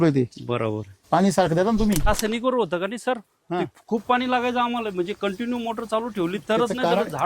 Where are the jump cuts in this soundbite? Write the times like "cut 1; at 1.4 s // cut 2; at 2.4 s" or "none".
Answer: cut 1; at 2.1 s